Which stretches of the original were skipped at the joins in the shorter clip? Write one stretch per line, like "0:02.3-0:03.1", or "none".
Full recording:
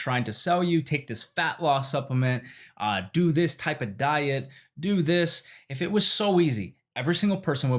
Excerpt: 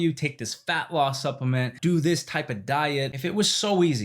0:02.4-0:03.1
0:04.5-0:05.7